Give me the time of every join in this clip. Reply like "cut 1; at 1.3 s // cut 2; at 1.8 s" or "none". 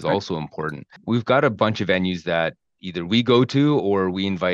cut 1; at 1.0 s